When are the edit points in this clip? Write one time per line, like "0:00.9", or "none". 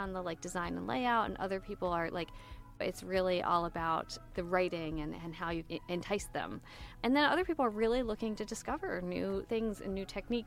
0:02.8
0:04.2
0:05.6
0:06.9